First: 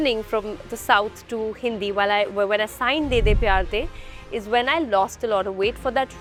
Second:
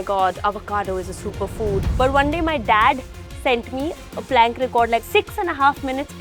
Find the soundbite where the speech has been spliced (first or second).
second